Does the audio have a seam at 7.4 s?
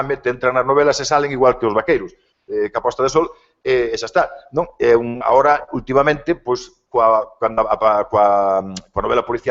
no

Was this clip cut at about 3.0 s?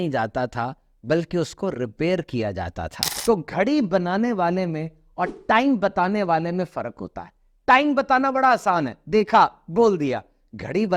yes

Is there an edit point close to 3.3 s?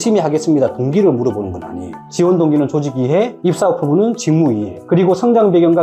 no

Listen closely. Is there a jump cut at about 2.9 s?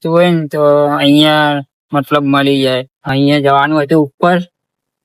yes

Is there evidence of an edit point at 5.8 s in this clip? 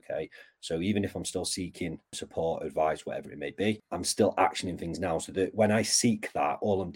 no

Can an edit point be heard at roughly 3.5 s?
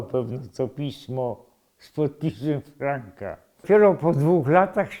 yes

